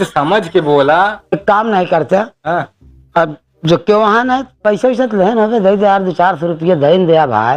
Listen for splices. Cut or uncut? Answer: cut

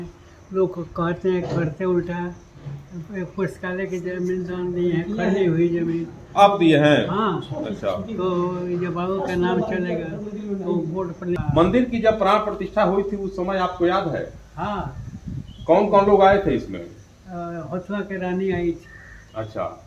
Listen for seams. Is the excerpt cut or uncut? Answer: cut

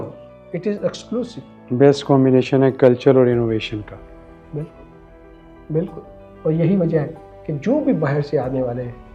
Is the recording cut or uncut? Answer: cut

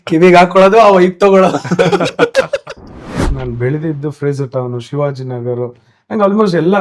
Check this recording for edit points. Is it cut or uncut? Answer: cut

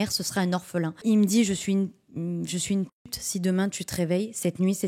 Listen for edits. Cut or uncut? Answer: cut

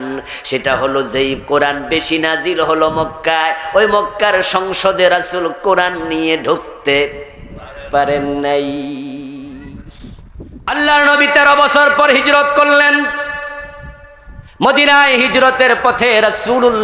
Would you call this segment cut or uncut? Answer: cut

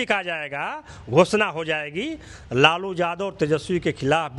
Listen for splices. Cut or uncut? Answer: uncut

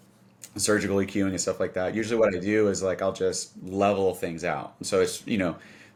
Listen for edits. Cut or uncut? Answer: uncut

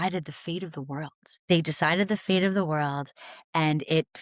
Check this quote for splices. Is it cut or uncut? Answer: cut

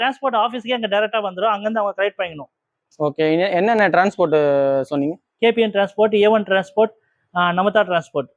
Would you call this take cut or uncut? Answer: uncut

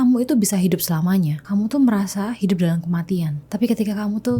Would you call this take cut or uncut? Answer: cut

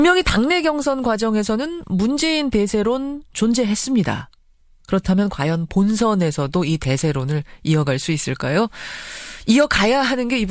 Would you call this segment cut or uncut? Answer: uncut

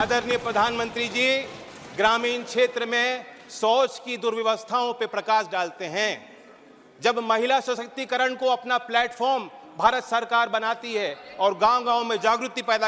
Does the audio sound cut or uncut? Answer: uncut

